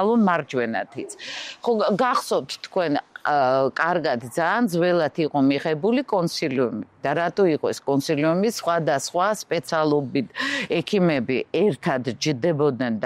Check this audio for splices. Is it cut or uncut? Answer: uncut